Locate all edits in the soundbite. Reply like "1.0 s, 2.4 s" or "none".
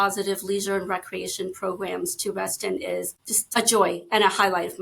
3.6 s